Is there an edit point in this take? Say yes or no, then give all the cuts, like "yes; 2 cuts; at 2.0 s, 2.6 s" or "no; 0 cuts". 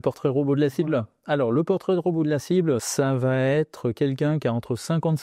yes; 1 cut; at 2.9 s